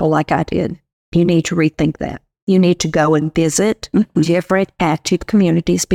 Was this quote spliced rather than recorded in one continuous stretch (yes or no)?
no